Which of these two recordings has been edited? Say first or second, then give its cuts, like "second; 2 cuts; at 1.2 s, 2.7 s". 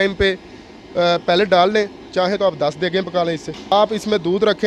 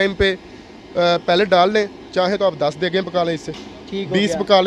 first; 1 cut; at 3.7 s